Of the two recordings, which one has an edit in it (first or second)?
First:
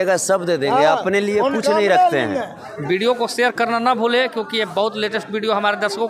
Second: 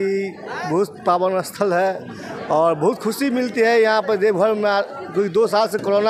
first